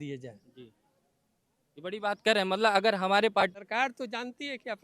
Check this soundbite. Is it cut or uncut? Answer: cut